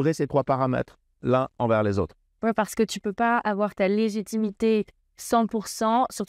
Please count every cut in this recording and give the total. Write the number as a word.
zero